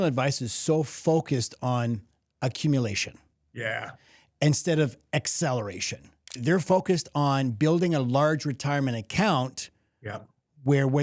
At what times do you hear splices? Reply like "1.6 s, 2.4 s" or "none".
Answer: 6.4 s